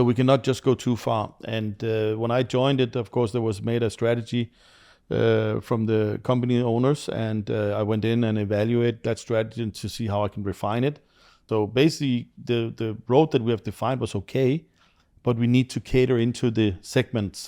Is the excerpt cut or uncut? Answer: cut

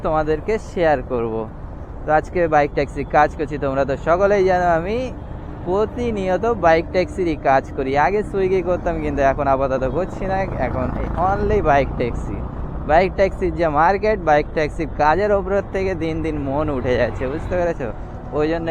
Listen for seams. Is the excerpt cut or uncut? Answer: uncut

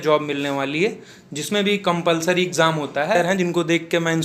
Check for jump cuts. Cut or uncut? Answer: cut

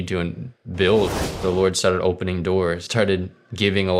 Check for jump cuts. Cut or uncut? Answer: cut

